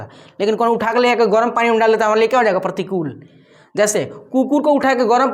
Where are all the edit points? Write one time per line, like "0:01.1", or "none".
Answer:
none